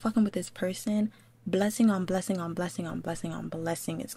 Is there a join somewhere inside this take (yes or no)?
no